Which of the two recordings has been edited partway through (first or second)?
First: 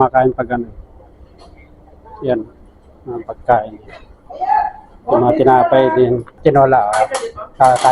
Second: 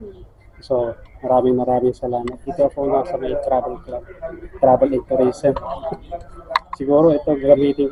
first